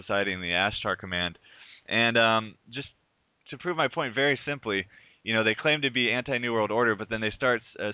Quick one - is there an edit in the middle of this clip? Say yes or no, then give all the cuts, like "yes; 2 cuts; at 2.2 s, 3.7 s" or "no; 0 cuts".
no; 0 cuts